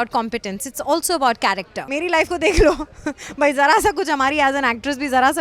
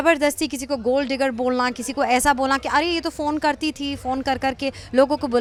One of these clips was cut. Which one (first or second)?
first